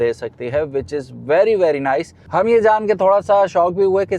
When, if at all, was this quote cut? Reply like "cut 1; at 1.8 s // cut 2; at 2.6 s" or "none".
cut 1; at 2.2 s

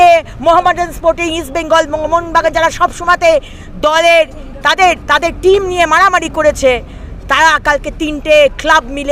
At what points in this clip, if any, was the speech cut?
none

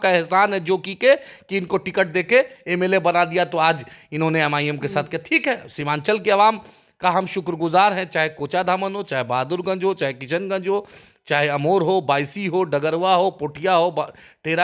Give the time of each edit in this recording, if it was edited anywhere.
none

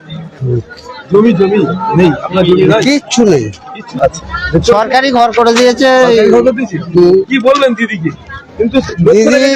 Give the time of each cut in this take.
cut 1; at 3.9 s

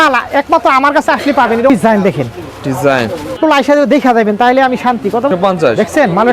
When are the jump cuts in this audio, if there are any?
cut 1; at 1.7 s // cut 2; at 3.4 s // cut 3; at 5.3 s

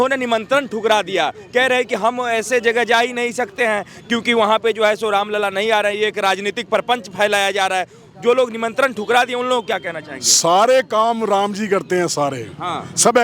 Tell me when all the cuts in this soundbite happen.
none

